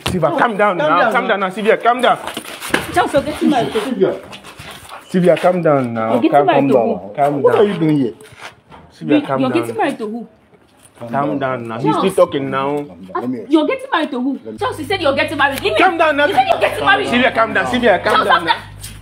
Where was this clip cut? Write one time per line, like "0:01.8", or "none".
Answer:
none